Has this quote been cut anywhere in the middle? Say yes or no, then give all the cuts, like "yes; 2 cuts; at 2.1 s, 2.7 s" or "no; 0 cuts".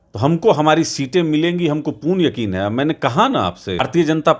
yes; 1 cut; at 3.3 s